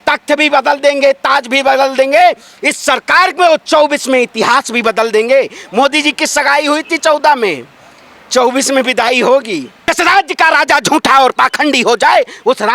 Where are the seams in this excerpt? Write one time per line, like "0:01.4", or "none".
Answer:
0:09.7